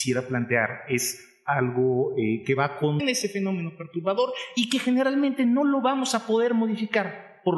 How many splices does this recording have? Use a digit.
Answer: 0